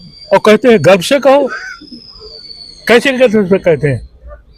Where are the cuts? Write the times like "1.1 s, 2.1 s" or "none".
none